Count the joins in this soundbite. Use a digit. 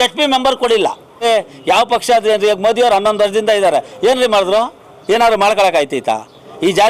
1